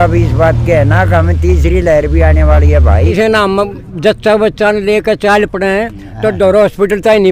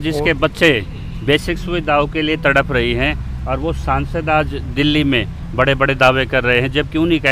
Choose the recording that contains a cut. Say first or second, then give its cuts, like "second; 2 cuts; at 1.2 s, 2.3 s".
first; 1 cut; at 3.1 s